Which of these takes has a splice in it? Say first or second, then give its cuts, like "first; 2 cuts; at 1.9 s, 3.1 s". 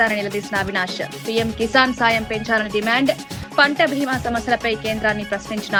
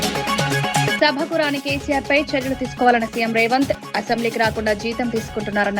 second; 1 cut; at 0.9 s